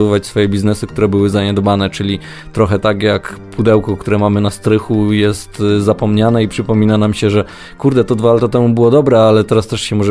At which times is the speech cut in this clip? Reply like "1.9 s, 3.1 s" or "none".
none